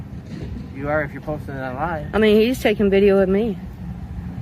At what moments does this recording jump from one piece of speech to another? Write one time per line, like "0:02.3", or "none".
none